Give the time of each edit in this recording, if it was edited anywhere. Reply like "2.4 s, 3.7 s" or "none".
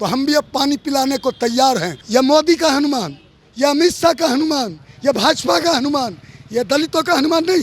2.0 s